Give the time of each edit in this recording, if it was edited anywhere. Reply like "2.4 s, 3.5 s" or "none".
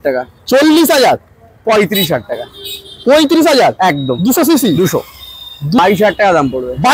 5.8 s